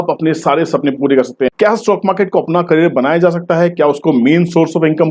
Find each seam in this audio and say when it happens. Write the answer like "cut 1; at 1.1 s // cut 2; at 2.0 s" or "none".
cut 1; at 1.5 s